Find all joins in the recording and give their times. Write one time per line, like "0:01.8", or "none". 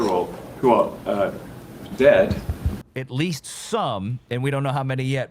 0:02.7